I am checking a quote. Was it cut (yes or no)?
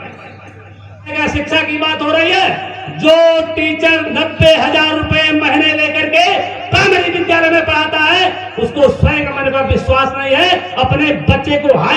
yes